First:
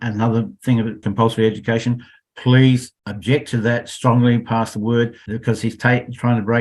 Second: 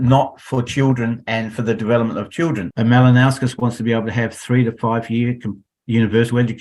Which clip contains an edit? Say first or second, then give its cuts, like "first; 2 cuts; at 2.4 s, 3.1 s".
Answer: second; 1 cut; at 2.7 s